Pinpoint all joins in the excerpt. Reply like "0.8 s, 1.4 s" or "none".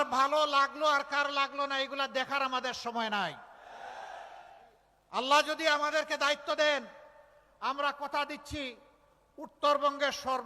3.1 s